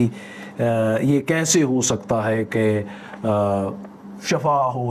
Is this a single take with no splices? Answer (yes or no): yes